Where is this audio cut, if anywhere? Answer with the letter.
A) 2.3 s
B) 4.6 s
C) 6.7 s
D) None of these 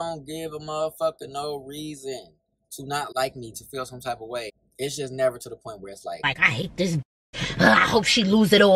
B